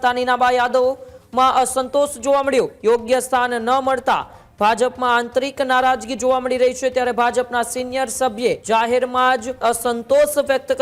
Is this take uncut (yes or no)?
no